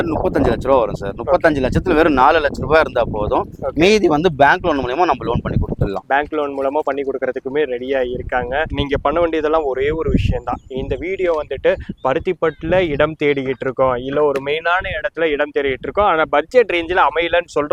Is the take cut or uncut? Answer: uncut